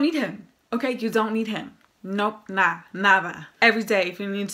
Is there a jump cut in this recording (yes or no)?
yes